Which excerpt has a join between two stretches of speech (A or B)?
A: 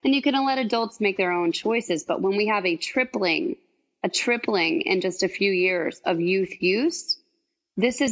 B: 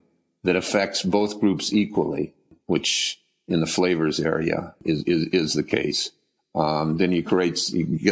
B